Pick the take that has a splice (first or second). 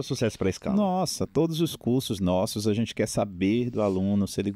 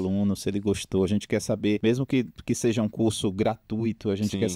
second